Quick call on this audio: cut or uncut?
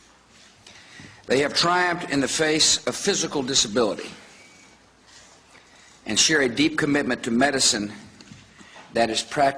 cut